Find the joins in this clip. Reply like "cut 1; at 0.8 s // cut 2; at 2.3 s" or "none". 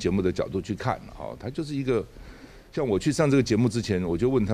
none